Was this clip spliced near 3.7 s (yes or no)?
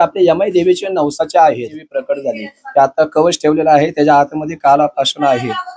no